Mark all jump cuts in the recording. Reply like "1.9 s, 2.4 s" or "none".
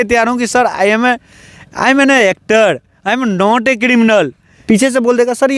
4.5 s